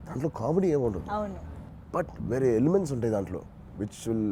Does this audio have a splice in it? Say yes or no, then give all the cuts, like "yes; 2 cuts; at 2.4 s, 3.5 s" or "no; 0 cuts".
no; 0 cuts